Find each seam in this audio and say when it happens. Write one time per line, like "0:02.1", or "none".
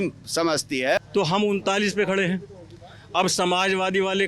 0:01.0